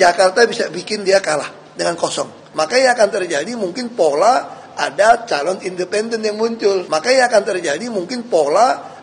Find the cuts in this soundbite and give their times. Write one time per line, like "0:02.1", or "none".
0:06.9